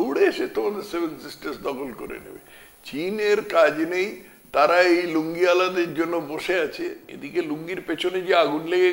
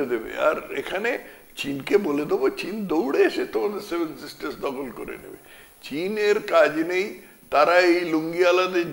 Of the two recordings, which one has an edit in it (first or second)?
first